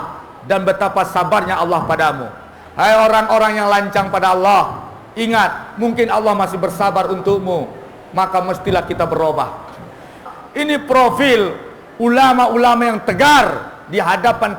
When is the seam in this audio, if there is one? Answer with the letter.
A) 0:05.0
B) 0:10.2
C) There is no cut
B